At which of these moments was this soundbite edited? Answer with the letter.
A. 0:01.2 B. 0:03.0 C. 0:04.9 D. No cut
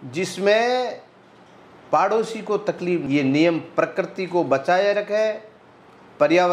B